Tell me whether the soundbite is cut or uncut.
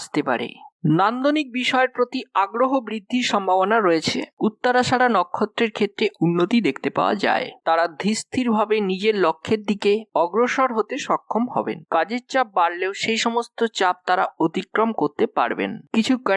cut